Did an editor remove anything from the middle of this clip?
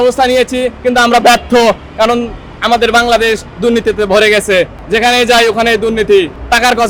no; 0 cuts

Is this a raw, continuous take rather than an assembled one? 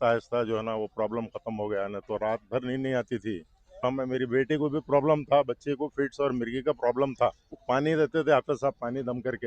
no; 2 cuts; at 3.8 s, 7.5 s

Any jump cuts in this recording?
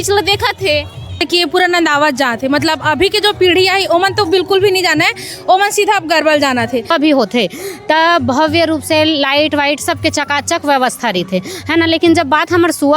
yes; 2 cuts; at 1.2 s, 6.9 s

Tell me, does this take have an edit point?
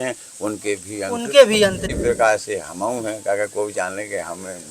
yes; 1 cut; at 1.8 s

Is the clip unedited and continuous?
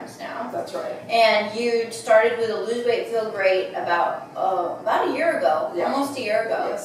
yes; 0 cuts

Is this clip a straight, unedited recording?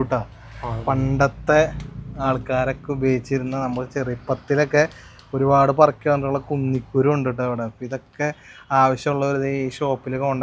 yes; 0 cuts

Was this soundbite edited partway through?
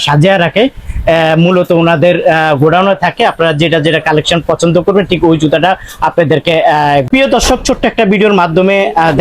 yes; 1 cut; at 7.0 s

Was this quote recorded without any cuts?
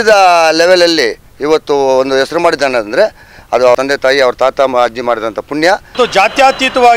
no; 2 cuts; at 3.8 s, 5.9 s

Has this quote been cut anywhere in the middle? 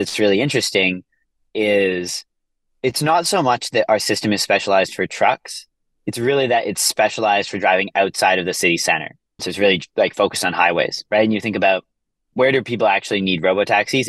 no; 0 cuts

